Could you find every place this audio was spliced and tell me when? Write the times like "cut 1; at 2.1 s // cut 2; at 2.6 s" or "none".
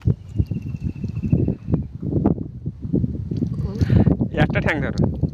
cut 1; at 3.6 s